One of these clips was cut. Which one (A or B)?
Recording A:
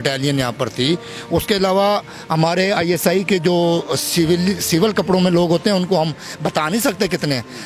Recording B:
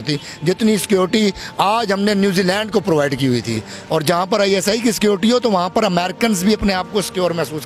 B